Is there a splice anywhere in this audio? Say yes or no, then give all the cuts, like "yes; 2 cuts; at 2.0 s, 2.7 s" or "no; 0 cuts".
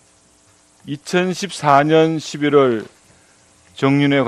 no; 0 cuts